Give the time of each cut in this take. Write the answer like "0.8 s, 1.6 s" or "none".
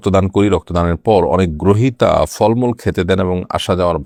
none

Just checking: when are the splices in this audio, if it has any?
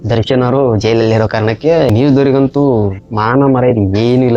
1.9 s

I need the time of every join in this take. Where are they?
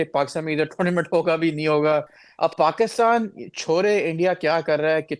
2.2 s

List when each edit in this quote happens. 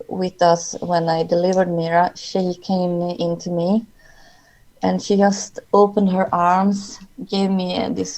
none

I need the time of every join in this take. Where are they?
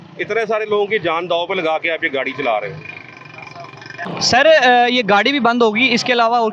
4.1 s

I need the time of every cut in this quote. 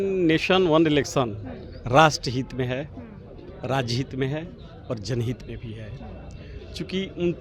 none

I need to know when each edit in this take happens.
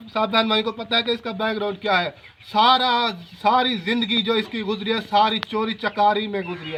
none

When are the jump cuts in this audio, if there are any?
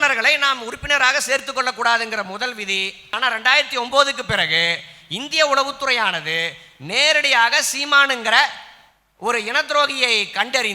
3.2 s

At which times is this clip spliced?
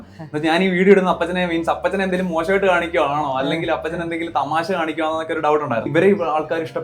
5.9 s

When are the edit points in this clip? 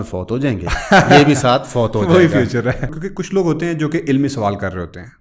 2.9 s

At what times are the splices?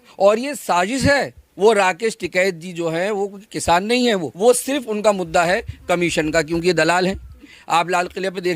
1.4 s, 4.3 s, 7.5 s

